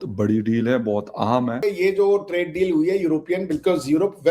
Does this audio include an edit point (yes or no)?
yes